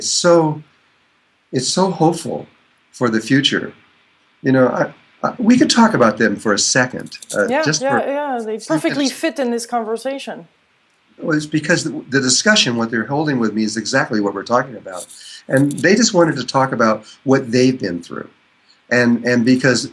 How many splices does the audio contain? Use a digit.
1